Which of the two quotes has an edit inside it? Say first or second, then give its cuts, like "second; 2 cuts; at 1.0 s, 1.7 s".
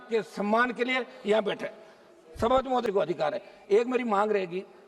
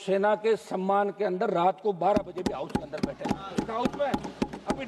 first; 1 cut; at 2.8 s